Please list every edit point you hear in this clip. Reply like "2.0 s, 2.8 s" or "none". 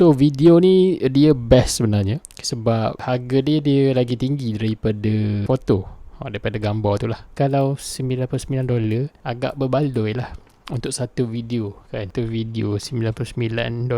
7.3 s, 12.1 s